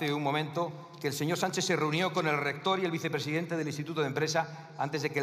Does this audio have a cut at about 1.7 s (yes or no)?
no